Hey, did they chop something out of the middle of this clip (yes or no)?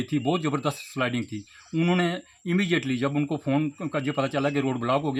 no